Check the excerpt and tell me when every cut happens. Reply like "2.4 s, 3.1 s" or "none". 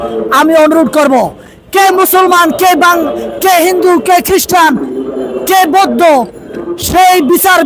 none

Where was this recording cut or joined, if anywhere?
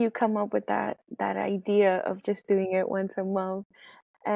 none

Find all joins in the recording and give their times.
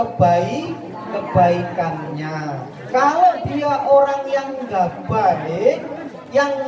none

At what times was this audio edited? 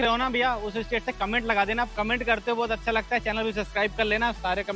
none

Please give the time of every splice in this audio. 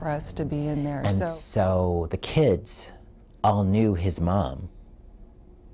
1.0 s

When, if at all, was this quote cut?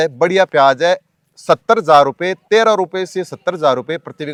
none

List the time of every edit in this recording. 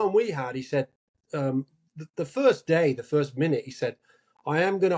none

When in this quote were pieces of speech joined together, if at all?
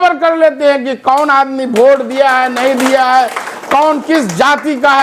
none

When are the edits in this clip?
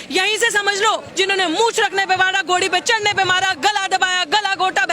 1.1 s

